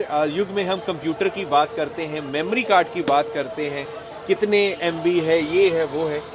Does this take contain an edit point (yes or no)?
no